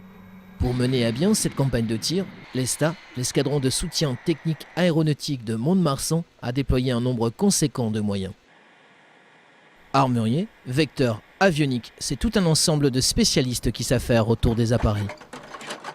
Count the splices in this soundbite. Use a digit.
1